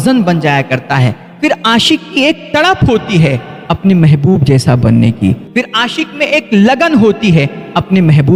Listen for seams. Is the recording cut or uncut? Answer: uncut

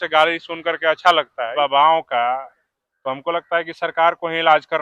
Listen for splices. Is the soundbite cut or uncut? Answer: cut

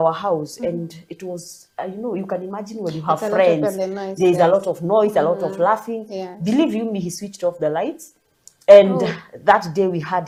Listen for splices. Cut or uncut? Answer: uncut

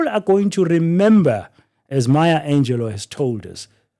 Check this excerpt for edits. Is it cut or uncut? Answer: uncut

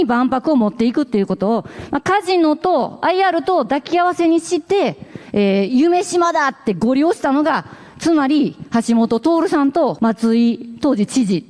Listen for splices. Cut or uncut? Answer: cut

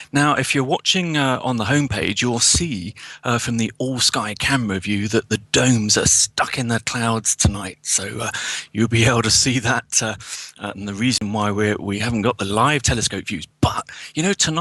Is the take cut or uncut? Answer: cut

